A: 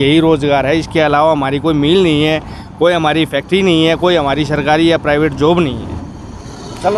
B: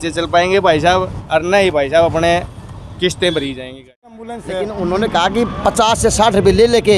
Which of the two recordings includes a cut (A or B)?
B